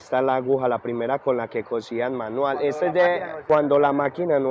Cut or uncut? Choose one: uncut